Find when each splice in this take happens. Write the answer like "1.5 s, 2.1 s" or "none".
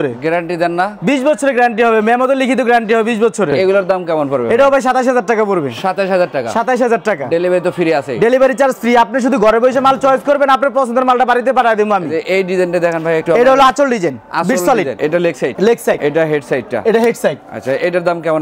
none